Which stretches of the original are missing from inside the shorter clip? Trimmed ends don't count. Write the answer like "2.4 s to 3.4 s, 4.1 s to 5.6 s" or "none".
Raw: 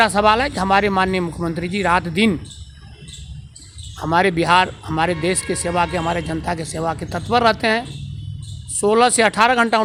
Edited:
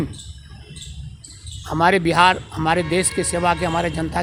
none

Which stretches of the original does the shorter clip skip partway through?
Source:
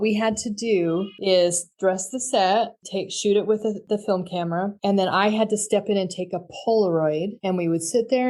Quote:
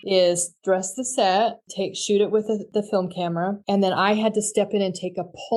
none

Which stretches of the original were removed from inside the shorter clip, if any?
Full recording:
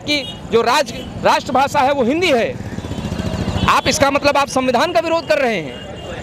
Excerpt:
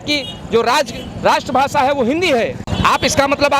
2.6 s to 3.5 s

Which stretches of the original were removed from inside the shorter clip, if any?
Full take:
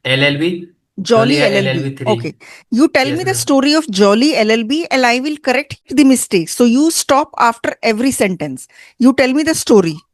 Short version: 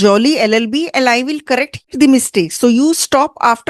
none

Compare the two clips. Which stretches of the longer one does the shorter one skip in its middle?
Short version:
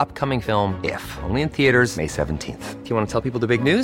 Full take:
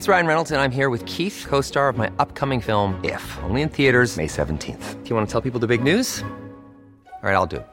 none

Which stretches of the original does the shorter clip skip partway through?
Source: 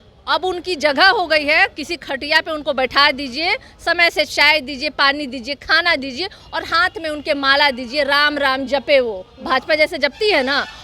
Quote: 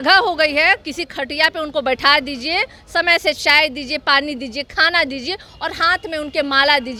none

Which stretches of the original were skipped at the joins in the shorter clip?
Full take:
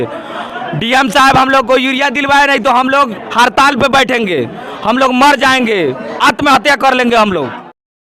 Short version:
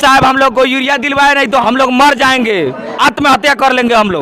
2.7 s to 4.8 s

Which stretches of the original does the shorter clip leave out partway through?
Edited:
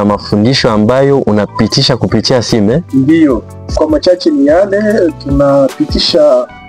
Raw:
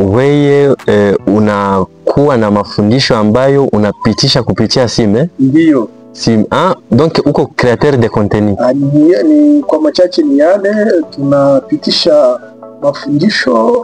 6.2 s to 9.6 s

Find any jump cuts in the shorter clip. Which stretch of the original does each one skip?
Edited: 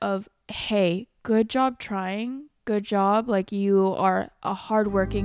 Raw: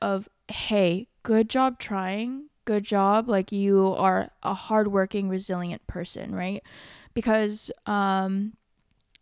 none

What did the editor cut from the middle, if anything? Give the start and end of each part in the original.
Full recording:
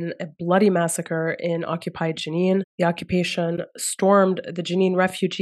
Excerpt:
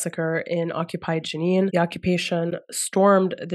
2.6 s to 2.8 s

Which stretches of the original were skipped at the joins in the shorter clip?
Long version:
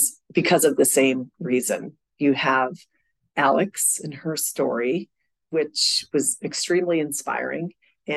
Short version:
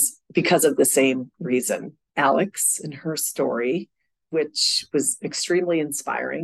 2.0 s to 3.2 s

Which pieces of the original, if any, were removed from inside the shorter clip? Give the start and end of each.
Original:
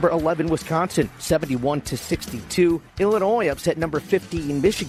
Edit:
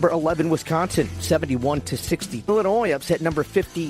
2.5 s to 3.1 s

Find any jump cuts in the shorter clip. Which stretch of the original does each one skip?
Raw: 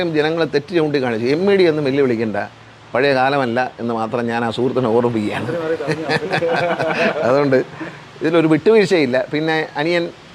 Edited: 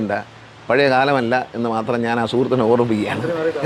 none

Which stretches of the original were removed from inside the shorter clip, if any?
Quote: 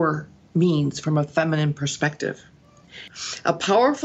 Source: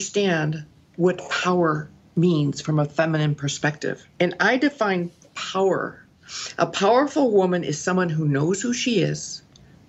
4.2 s to 5.7 s

